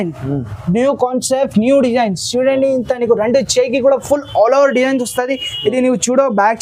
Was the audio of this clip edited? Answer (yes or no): no